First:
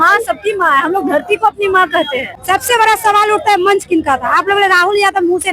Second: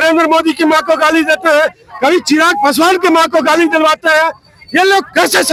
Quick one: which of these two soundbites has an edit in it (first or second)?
first